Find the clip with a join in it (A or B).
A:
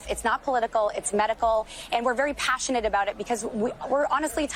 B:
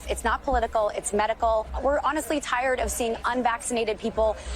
B